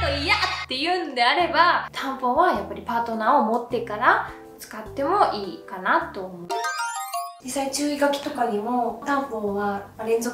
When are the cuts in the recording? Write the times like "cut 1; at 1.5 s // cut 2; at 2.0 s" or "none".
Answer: none